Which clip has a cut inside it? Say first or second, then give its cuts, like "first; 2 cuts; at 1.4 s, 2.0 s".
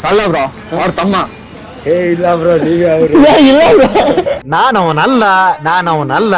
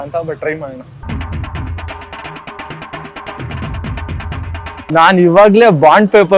second; 1 cut; at 4.7 s